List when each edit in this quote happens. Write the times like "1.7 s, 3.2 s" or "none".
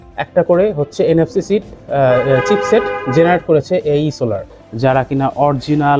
4.6 s